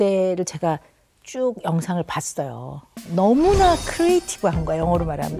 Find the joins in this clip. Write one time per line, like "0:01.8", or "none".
none